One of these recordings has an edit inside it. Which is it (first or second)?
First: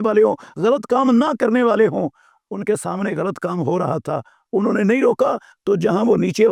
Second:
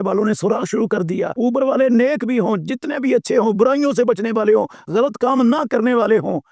second